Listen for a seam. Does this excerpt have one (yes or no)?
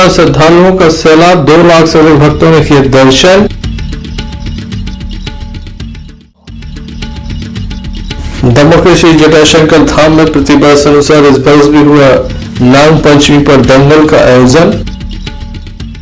no